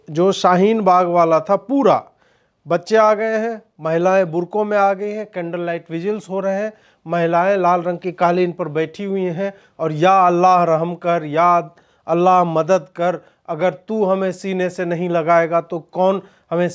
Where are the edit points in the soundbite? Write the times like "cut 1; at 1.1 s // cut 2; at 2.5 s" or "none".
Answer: none